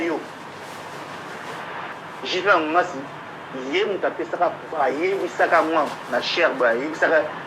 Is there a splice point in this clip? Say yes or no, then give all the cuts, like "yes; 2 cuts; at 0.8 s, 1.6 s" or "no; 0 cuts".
yes; 1 cut; at 2.0 s